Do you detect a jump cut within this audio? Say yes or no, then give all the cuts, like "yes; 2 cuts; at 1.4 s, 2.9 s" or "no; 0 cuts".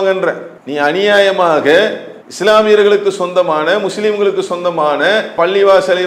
no; 0 cuts